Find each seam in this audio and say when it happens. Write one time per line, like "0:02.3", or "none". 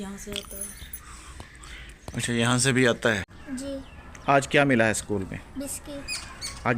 0:03.4